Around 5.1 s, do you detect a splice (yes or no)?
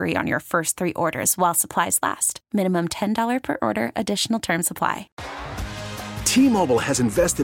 yes